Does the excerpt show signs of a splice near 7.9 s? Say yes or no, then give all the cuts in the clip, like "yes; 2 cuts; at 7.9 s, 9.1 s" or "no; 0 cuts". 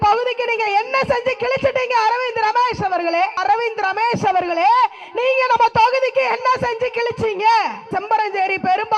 yes; 2 cuts; at 3.4 s, 7.9 s